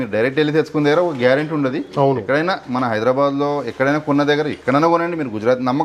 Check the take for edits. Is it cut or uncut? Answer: uncut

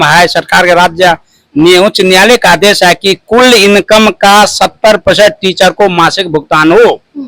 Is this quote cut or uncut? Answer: uncut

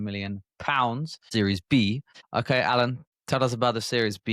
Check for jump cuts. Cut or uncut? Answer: cut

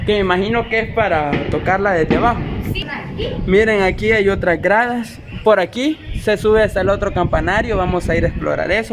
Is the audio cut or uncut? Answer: cut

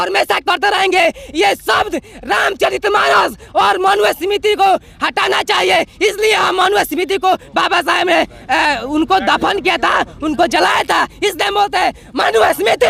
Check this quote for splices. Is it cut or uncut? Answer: uncut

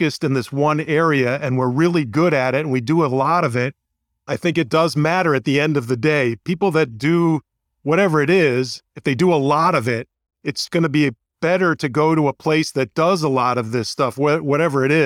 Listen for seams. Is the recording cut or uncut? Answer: uncut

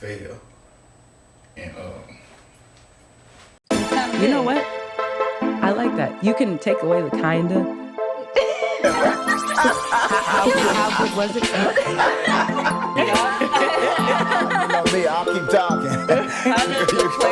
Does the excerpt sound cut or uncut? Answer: cut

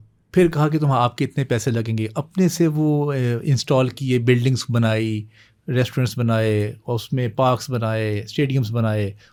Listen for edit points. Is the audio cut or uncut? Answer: uncut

